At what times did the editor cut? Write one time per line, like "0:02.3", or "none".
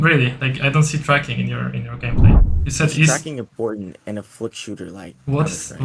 0:02.5